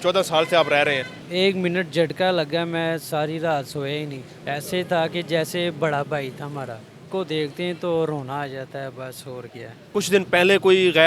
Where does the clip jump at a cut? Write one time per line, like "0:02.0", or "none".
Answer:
0:01.2
0:04.3
0:07.1
0:09.8